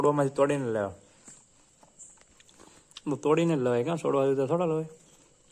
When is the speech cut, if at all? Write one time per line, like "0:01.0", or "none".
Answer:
none